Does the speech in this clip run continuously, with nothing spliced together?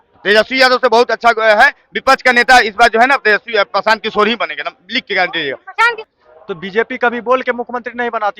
no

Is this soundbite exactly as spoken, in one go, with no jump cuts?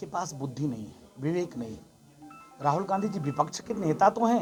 yes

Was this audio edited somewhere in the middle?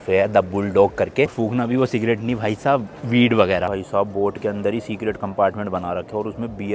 yes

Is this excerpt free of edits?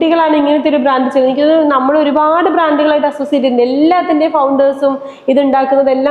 yes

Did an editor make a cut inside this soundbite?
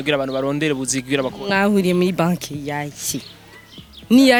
no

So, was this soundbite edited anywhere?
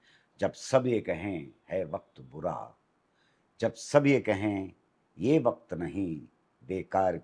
no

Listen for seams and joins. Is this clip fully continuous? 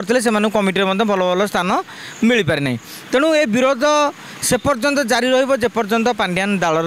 yes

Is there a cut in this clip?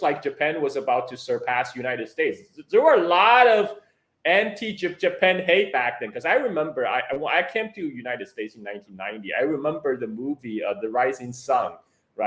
no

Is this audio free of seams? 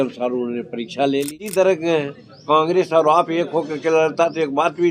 no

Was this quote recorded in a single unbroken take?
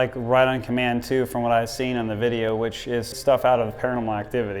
no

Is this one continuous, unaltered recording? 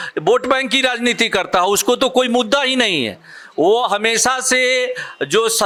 yes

